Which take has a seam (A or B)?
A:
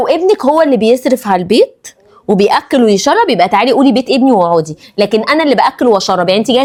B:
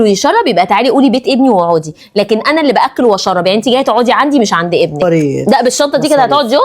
B